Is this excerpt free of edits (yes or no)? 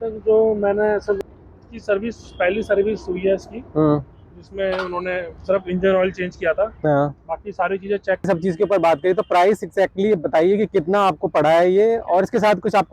no